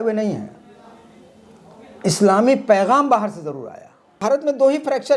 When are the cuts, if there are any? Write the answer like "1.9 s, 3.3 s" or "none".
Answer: 4.2 s